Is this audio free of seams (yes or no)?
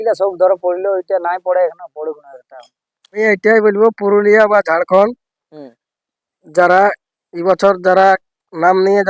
no